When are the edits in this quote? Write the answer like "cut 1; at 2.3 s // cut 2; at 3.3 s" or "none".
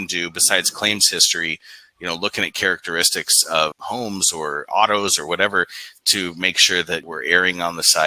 cut 1; at 3.8 s // cut 2; at 7.0 s